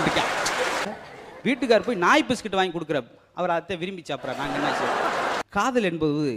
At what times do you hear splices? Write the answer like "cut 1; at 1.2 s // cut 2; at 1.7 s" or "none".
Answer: cut 1; at 0.9 s // cut 2; at 5.4 s